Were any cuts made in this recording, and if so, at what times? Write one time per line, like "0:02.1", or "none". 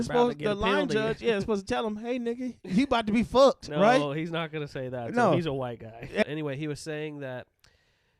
0:06.2